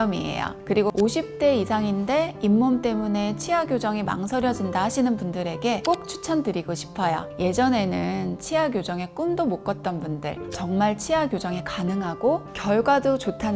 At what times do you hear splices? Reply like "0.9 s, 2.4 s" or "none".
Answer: 0.7 s, 7.3 s, 10.4 s